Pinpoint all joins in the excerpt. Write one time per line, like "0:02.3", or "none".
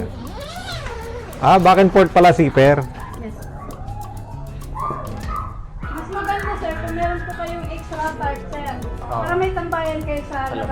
0:09.0